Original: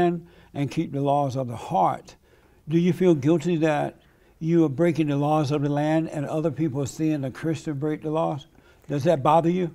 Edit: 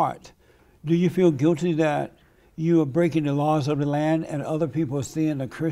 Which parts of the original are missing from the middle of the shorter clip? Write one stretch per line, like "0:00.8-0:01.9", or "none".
none